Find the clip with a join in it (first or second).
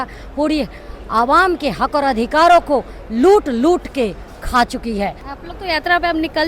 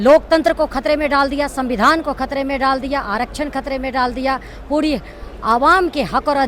first